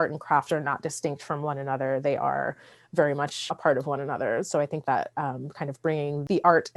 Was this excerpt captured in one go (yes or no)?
no